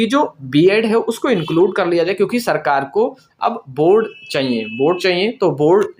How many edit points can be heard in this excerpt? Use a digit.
0